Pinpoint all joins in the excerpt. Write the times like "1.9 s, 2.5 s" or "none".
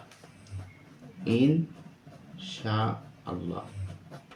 none